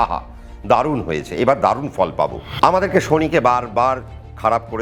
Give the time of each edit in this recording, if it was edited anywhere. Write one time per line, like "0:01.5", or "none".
0:02.4